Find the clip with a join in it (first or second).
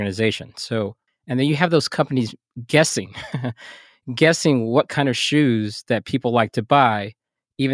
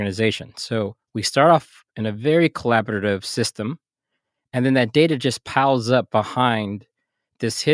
first